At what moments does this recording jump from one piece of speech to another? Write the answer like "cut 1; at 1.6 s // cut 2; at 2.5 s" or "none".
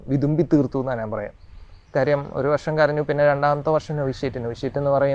none